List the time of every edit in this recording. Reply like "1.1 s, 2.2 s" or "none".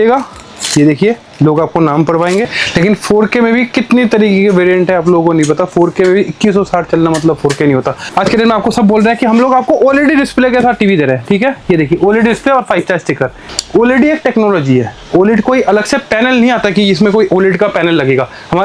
2.5 s, 8.1 s, 13.5 s